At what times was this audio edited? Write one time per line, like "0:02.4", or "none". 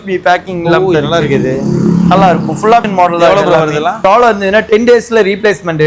0:02.9
0:04.0